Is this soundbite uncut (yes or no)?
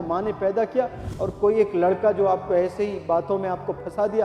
yes